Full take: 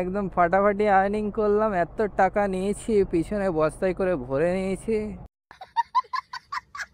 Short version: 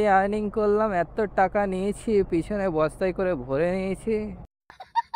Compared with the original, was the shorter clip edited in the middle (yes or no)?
no